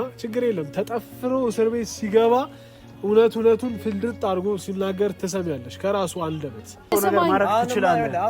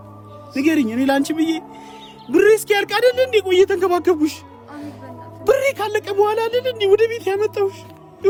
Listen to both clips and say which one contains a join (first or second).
first